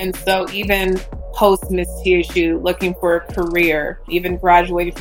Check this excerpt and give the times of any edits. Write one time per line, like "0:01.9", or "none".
0:04.1

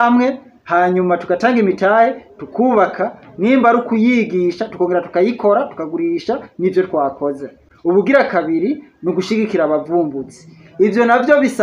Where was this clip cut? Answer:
none

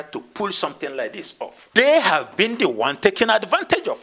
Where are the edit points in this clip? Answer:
0:01.6

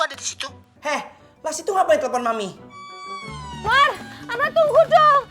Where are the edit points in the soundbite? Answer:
0:03.7

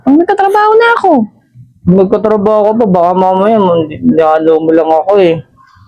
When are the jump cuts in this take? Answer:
none

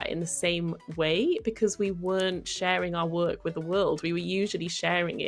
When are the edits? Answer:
none

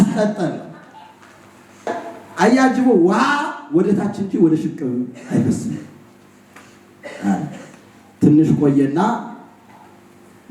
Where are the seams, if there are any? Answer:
0:01.9

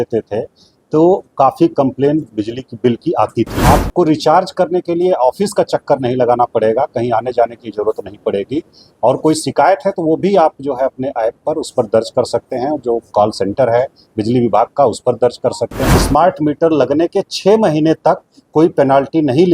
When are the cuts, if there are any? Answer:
0:03.6
0:15.9

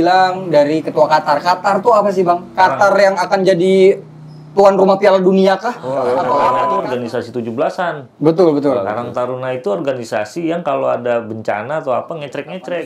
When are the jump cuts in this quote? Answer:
0:06.6

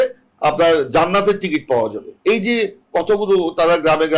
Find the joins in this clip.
0:02.1

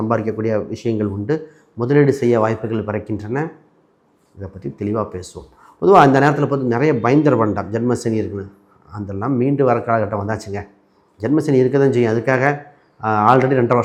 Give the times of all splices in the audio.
none

